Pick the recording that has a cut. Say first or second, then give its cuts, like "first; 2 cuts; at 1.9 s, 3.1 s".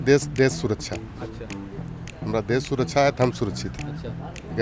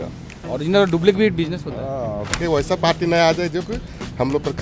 second; 1 cut; at 2.4 s